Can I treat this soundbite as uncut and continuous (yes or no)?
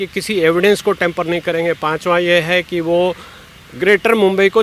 yes